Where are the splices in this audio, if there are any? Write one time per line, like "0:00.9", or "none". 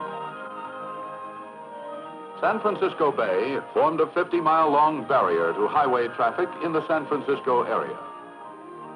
0:03.2